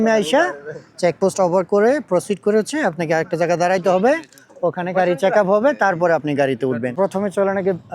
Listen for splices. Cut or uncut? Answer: cut